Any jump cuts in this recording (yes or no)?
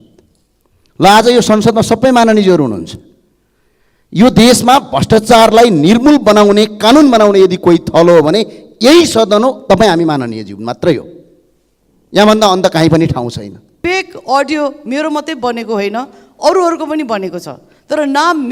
yes